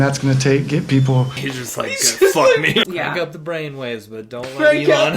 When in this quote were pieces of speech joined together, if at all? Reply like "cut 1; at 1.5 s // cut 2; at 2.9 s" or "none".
cut 1; at 2.8 s